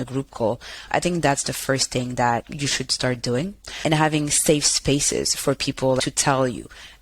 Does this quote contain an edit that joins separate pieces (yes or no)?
yes